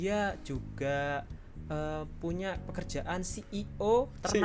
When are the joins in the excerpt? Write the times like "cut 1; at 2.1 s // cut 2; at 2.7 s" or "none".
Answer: none